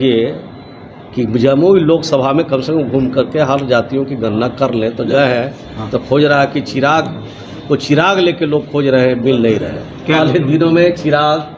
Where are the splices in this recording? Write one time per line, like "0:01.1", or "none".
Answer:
0:05.1
0:10.2